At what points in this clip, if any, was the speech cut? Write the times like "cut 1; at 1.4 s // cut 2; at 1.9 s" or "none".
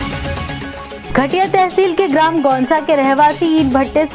none